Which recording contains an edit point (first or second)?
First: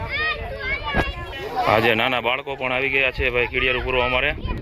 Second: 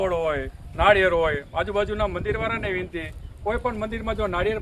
first